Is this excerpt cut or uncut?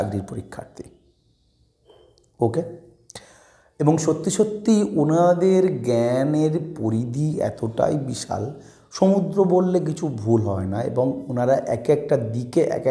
uncut